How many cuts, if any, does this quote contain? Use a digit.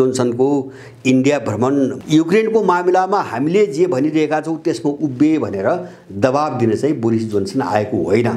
1